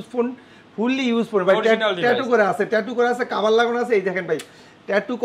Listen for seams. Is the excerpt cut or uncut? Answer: uncut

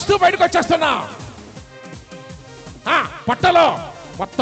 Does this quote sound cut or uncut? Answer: uncut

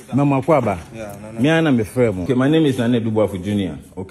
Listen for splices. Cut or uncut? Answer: cut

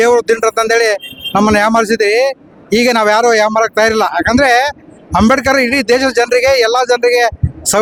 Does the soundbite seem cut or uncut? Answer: uncut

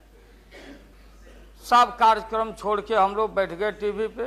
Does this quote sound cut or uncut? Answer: cut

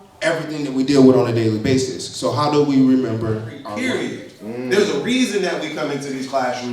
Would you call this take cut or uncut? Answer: cut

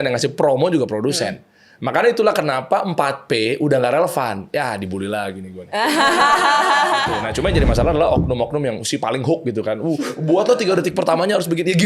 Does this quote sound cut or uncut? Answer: cut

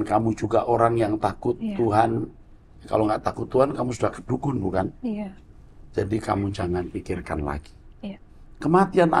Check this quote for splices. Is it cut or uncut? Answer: uncut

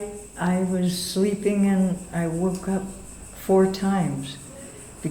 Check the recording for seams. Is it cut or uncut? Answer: uncut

